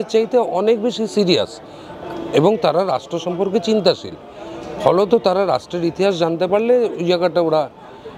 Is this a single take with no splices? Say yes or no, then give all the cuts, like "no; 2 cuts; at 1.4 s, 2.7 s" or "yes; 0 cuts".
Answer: yes; 0 cuts